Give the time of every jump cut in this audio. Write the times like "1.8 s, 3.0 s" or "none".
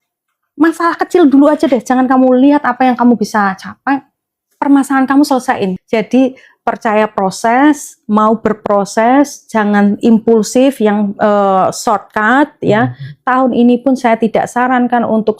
5.8 s